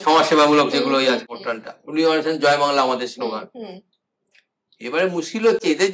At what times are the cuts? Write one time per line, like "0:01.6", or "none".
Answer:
none